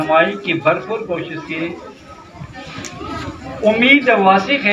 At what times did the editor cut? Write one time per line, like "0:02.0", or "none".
none